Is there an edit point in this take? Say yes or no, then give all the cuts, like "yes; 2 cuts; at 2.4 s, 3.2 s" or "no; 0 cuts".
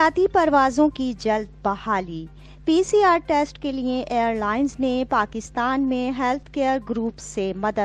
no; 0 cuts